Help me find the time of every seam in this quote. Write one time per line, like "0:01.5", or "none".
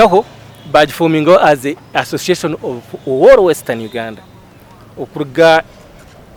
none

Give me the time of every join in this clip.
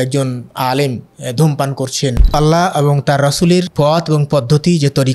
0:02.3
0:03.7

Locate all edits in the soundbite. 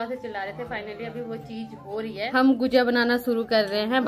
none

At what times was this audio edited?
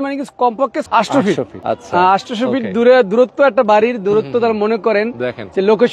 0:00.8
0:01.5

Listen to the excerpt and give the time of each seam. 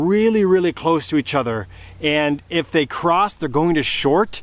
none

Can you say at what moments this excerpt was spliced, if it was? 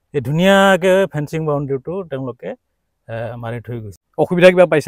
0:04.0

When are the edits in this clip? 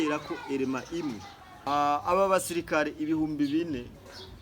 0:01.7

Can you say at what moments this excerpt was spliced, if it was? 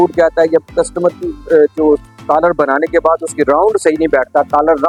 none

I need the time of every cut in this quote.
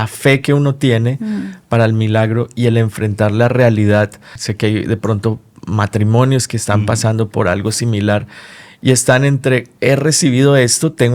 0:04.4
0:09.7

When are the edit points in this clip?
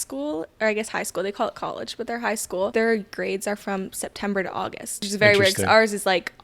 0:02.7
0:05.0

